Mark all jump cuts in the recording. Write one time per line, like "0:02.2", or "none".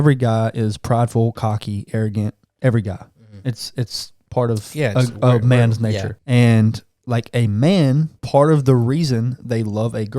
0:06.1
0:08.2